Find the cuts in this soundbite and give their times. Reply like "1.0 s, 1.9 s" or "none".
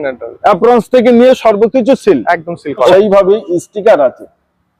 2.9 s